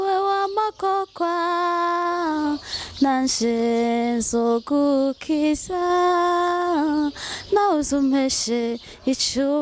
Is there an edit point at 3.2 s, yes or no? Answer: no